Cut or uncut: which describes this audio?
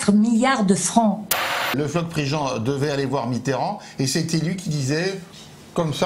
cut